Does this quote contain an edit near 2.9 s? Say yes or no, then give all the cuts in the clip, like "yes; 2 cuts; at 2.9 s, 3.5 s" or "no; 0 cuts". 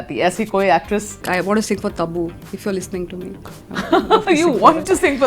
no; 1 cut; at 1.2 s